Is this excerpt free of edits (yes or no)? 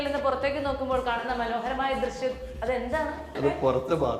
no